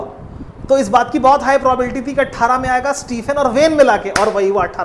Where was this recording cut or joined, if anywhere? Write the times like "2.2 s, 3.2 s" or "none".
none